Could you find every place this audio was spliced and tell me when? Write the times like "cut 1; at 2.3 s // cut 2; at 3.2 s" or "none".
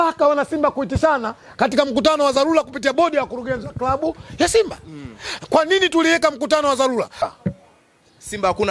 cut 1; at 7.2 s